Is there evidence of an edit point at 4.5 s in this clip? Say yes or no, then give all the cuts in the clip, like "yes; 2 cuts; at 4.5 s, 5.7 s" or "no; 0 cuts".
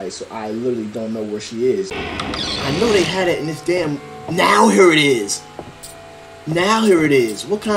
no; 1 cut; at 2.0 s